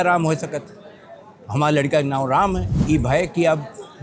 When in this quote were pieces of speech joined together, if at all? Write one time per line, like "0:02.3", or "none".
0:02.7